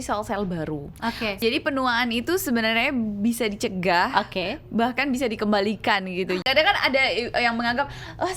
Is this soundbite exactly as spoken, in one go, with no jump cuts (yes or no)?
no